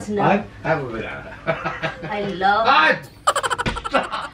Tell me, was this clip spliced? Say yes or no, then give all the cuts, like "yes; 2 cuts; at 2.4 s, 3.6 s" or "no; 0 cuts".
yes; 1 cut; at 3.3 s